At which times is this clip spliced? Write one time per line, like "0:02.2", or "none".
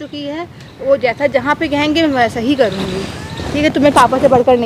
none